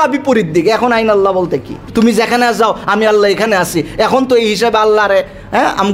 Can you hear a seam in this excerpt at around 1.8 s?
yes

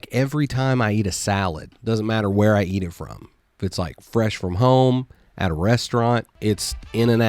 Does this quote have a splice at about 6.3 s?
yes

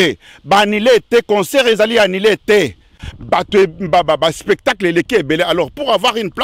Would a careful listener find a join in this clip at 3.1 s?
yes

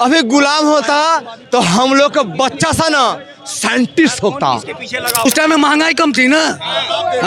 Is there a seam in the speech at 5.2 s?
yes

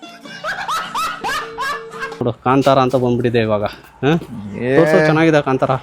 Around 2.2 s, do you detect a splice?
yes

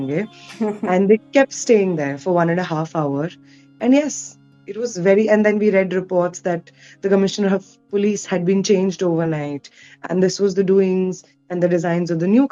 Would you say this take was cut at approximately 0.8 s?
no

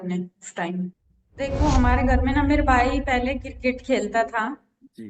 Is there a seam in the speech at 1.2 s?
yes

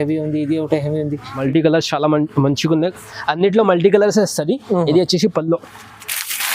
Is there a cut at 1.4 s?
yes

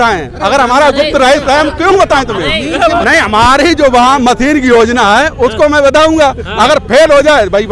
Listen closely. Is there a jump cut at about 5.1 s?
no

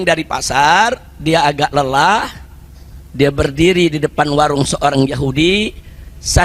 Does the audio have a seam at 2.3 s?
no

